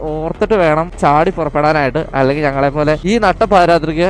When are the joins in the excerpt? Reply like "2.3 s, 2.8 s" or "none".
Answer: 0.9 s, 3.0 s